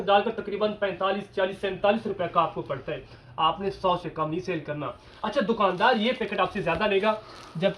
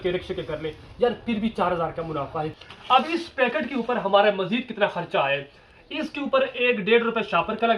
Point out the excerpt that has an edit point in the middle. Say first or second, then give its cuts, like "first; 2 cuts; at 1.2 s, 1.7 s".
second; 1 cut; at 2.6 s